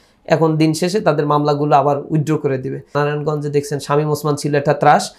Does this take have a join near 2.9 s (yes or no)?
yes